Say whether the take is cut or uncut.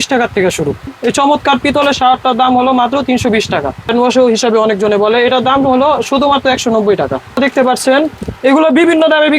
cut